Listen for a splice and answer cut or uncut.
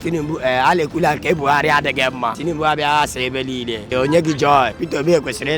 cut